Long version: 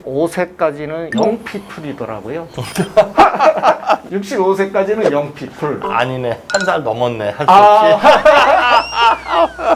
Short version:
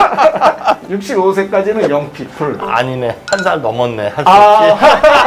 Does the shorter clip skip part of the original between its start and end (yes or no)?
no